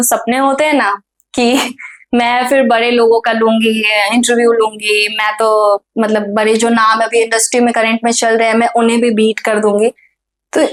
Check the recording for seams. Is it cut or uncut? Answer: uncut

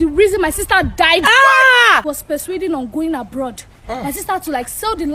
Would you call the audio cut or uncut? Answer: cut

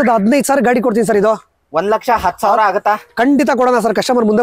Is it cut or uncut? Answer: uncut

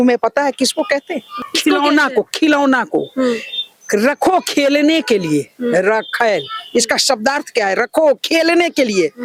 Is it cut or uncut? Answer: uncut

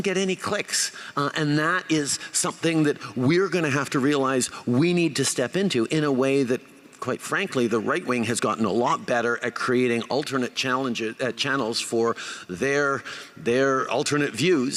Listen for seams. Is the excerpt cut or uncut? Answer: uncut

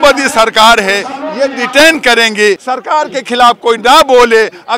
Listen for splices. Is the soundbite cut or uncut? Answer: cut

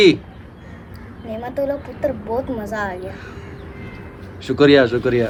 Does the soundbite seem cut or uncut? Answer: uncut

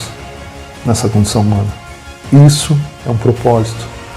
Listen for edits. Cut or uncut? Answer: uncut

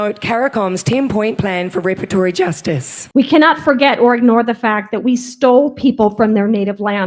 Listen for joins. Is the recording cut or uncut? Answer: cut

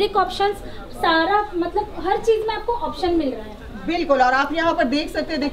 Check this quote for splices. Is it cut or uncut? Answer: uncut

